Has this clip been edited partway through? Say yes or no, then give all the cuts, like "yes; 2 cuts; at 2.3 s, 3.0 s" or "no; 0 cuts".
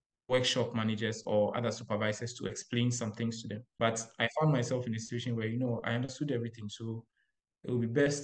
yes; 1 cut; at 3.7 s